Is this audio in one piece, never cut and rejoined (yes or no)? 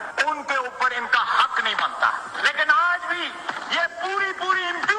yes